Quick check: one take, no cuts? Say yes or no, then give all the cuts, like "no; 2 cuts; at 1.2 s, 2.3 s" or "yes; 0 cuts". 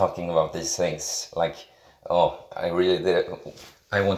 yes; 0 cuts